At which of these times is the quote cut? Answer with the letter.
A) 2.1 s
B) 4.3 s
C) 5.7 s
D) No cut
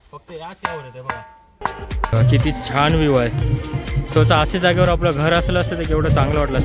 A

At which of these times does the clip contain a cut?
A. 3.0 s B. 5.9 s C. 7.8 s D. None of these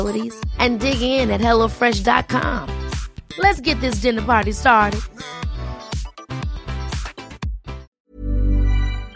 C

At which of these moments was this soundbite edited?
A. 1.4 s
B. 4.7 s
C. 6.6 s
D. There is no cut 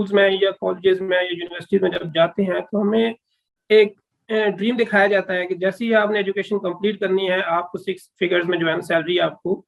D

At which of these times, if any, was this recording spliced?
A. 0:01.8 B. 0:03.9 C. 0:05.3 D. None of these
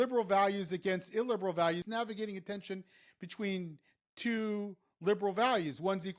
A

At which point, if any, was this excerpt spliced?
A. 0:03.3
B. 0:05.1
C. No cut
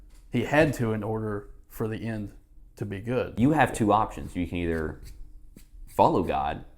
A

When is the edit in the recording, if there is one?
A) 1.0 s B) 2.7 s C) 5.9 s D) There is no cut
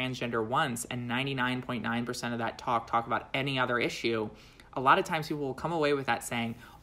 D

